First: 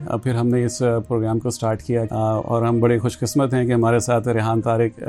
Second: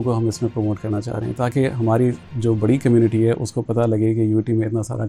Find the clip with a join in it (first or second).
first